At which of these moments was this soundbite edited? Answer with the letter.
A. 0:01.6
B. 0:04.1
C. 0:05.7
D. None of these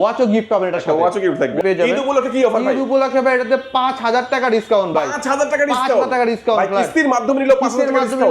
A